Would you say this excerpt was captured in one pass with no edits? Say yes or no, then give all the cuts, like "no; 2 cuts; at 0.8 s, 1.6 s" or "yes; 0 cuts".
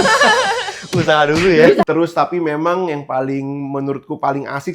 no; 1 cut; at 1.8 s